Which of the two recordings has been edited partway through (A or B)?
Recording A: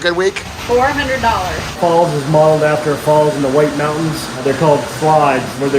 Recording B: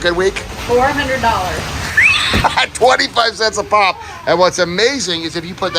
A